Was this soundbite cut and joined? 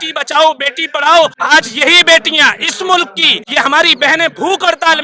yes; 2 cuts; at 1.4 s, 3.3 s

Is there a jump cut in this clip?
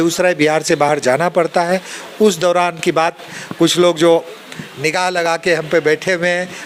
no; 0 cuts

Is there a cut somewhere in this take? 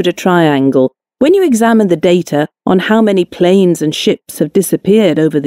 yes; 2 cuts; at 1.5 s, 4.2 s

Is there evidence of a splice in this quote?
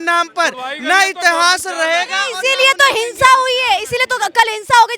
no; 0 cuts

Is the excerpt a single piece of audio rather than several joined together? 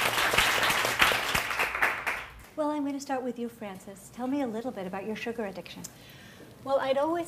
no; 1 cut; at 3.7 s

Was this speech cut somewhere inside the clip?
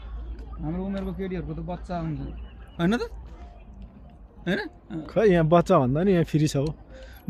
no; 0 cuts

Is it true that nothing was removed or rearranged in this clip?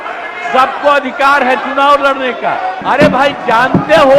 no; 1 cut; at 2.8 s

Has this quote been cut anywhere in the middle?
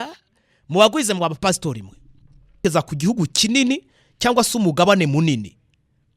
yes; 1 cut; at 2.6 s

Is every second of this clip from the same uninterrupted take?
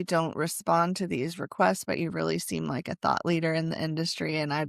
yes; 0 cuts

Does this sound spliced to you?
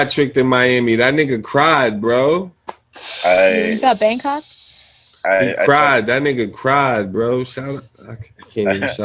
no; 0 cuts

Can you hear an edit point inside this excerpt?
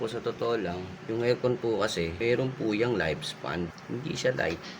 yes; 3 cuts; at 0.9 s, 2.1 s, 3.8 s

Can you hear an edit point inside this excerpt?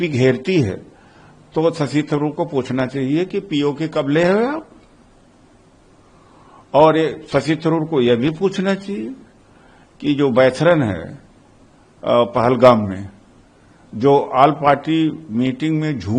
no; 0 cuts

